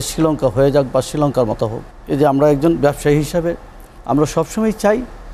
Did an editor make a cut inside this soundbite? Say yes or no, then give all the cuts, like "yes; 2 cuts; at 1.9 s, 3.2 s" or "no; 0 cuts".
yes; 1 cut; at 1.9 s